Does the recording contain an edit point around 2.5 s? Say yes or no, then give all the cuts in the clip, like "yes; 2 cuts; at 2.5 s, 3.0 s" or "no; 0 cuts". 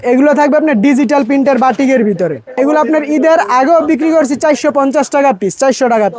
yes; 1 cut; at 2.5 s